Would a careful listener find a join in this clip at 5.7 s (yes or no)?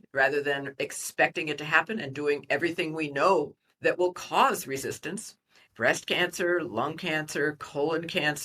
yes